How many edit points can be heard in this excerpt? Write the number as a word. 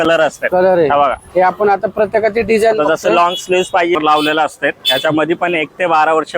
one